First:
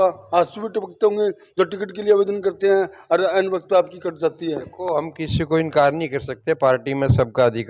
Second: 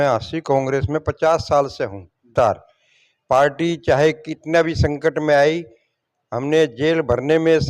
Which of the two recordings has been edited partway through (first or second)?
second